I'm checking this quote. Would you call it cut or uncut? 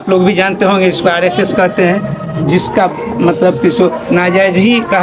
uncut